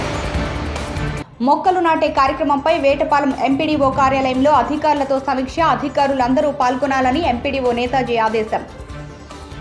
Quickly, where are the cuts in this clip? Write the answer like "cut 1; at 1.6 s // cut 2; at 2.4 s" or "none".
none